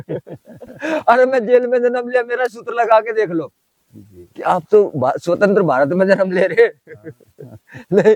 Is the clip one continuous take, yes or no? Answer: yes